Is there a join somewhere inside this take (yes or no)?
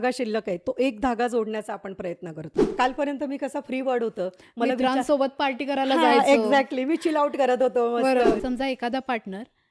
yes